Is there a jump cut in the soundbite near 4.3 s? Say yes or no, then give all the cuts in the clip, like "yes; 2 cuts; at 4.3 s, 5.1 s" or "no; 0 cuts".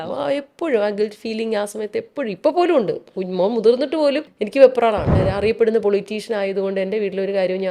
yes; 2 cuts; at 4.3 s, 5.1 s